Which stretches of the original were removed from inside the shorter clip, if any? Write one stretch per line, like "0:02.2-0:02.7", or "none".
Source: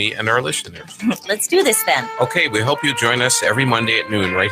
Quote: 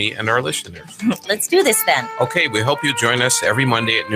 none